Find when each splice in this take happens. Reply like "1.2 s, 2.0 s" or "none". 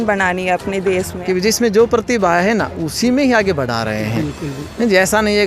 1.1 s